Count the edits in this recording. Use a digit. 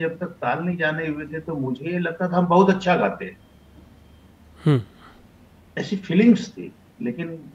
0